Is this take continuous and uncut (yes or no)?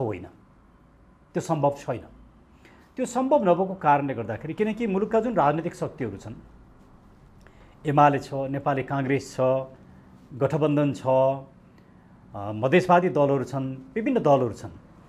yes